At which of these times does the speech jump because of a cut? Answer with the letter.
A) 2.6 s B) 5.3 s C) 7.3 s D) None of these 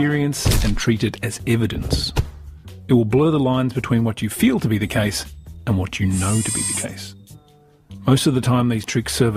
B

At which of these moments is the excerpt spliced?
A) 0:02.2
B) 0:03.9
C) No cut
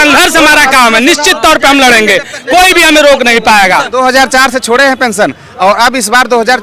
B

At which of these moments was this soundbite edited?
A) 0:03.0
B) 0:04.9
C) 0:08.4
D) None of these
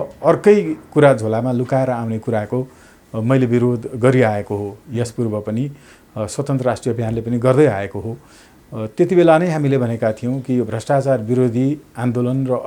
D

